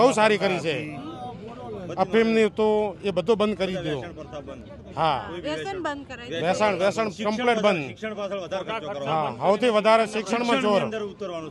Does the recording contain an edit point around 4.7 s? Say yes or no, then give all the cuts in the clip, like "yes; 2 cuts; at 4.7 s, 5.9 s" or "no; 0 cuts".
no; 0 cuts